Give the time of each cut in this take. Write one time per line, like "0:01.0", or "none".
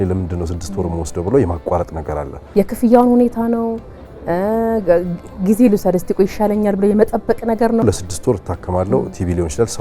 0:02.4
0:07.8